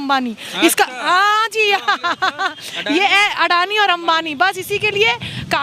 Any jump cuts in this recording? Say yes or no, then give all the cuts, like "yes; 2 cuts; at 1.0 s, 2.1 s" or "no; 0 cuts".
no; 0 cuts